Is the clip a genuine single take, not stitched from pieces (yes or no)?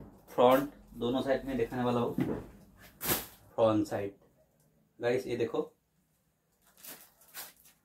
no